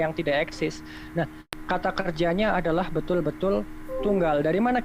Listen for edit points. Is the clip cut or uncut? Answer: cut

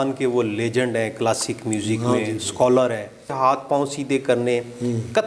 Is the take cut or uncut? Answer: cut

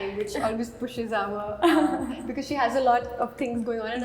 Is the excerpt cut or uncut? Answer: uncut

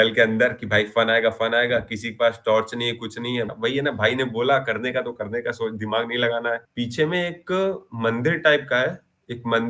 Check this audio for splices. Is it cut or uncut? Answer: cut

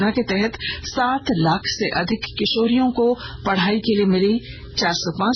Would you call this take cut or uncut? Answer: uncut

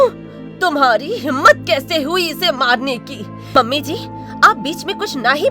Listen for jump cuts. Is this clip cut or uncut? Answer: cut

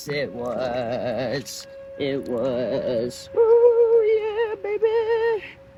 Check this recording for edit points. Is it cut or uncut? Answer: uncut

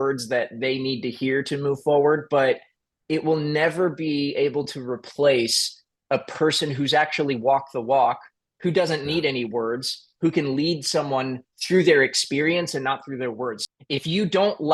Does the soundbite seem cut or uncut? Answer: cut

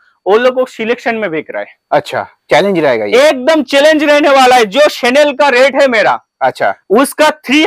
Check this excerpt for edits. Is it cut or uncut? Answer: uncut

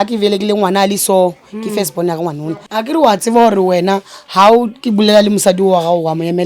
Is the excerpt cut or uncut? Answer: cut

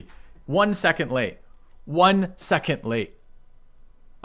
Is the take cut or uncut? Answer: uncut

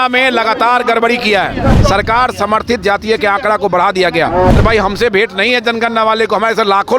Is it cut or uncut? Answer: cut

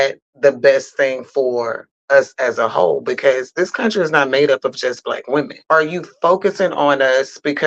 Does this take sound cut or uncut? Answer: cut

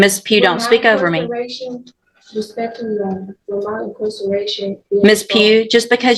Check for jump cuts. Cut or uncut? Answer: uncut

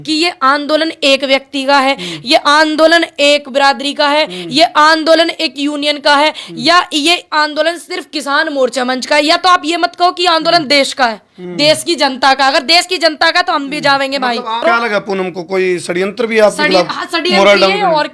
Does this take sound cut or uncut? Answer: cut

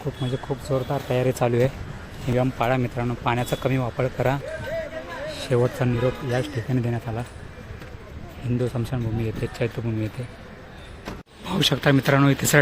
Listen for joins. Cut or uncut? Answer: cut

